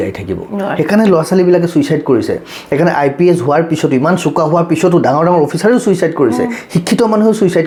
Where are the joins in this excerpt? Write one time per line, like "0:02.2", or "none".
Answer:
none